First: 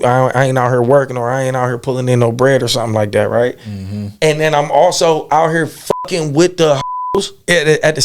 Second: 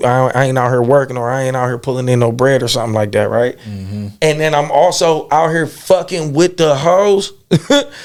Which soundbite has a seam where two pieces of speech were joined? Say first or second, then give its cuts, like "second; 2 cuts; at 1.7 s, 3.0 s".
first; 1 cut; at 6.8 s